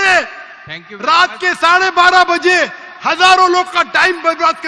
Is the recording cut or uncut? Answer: uncut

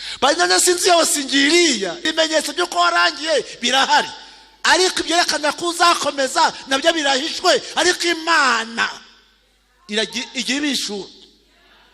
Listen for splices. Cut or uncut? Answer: cut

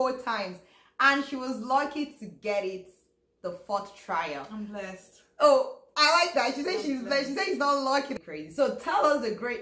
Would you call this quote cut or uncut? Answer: cut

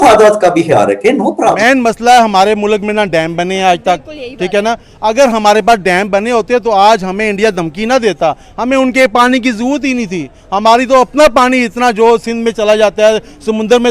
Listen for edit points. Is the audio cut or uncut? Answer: cut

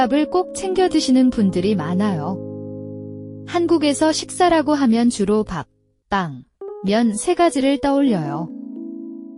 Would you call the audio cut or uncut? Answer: uncut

